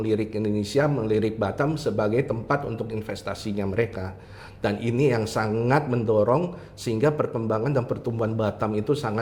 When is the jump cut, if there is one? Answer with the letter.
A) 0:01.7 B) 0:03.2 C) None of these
C